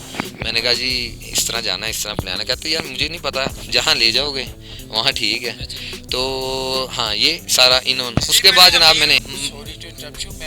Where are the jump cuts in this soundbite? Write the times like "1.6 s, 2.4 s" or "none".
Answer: 9.1 s